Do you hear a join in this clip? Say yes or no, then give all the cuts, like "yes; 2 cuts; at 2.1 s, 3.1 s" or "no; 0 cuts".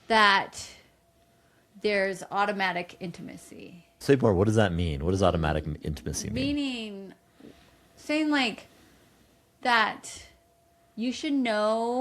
yes; 1 cut; at 4.0 s